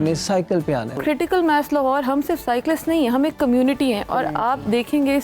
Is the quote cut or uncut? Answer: cut